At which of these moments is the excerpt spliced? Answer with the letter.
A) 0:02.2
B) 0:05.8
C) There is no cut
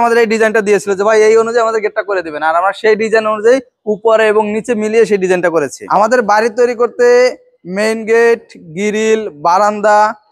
B